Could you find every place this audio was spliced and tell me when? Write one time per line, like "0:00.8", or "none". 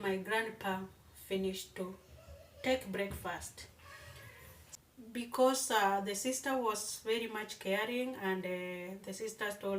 0:04.7

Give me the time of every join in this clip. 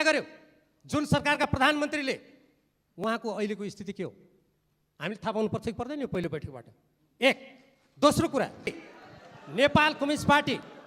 0:08.8

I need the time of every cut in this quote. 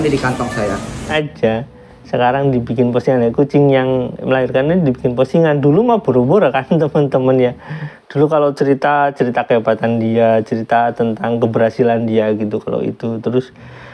0:01.1

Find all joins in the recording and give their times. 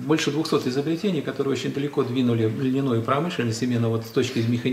none

